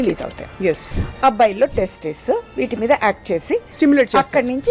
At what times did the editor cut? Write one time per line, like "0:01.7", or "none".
0:00.9